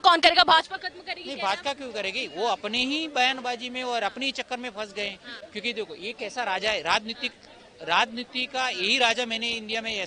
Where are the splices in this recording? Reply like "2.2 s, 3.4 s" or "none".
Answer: none